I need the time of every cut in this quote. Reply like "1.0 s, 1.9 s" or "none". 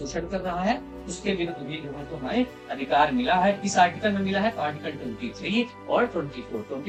none